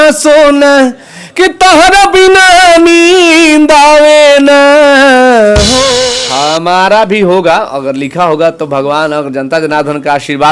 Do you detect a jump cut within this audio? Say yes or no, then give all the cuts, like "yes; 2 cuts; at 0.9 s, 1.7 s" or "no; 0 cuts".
yes; 1 cut; at 6.0 s